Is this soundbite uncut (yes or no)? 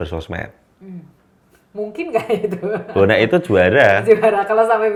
yes